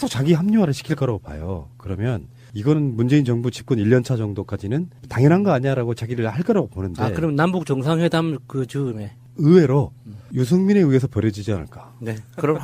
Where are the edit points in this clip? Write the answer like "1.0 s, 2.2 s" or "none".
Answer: 9.1 s